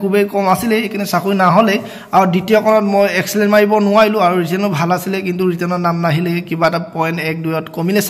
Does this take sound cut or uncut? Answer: uncut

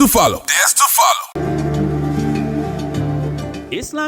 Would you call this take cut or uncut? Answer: cut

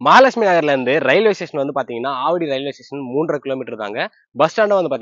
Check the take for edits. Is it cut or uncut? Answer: uncut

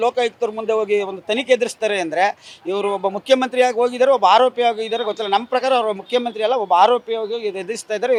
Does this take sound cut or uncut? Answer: uncut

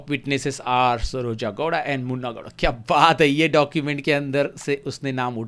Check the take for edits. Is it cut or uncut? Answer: uncut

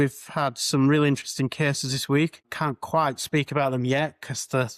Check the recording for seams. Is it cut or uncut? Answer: uncut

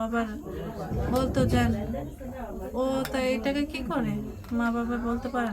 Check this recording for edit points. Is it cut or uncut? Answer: uncut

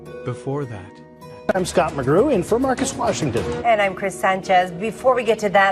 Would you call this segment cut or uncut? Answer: uncut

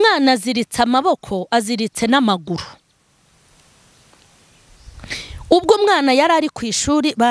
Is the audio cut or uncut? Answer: uncut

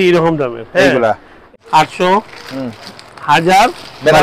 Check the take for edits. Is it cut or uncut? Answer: cut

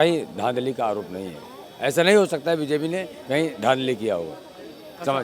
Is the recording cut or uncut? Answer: uncut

